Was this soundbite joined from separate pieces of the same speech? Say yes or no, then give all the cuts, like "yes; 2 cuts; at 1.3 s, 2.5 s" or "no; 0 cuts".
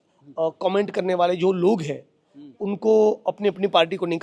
no; 0 cuts